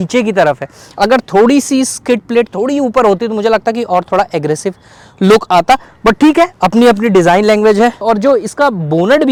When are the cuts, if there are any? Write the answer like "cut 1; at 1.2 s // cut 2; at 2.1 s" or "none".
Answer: none